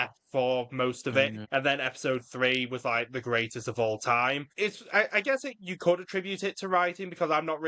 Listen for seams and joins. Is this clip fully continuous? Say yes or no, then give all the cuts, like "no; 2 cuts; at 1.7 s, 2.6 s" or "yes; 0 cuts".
no; 2 cuts; at 1.4 s, 4.5 s